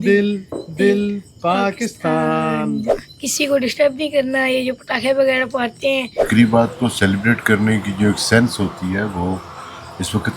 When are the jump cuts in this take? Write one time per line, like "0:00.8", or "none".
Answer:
0:02.9
0:06.2